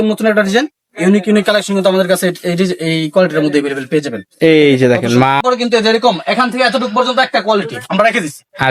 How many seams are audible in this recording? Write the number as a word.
one